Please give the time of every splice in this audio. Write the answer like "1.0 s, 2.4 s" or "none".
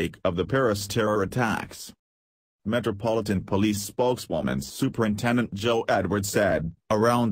3.7 s